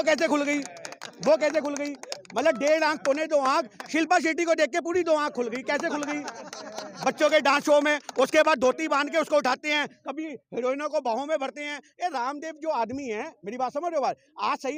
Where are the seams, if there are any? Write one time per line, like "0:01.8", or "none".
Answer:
none